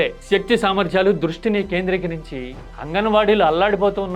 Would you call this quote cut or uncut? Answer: cut